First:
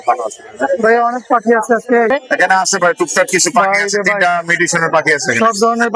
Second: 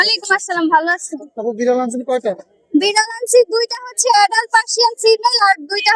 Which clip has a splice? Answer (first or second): first